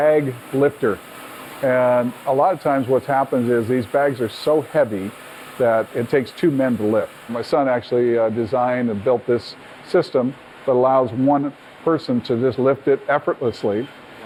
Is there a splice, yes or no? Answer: no